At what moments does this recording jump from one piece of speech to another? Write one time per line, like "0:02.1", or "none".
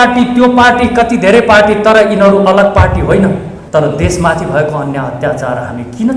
0:03.5